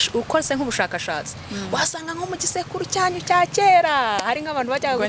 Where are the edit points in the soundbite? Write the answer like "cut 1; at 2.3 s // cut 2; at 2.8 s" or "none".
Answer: none